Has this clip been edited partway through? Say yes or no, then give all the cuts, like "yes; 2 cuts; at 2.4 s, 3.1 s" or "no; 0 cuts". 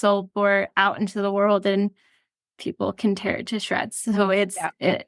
no; 0 cuts